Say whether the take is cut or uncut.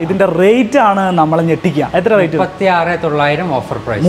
uncut